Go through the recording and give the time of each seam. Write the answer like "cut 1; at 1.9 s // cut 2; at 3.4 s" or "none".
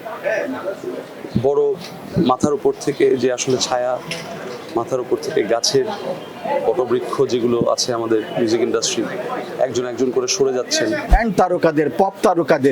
cut 1; at 11.1 s